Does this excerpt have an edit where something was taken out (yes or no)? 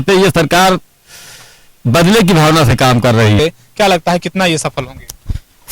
yes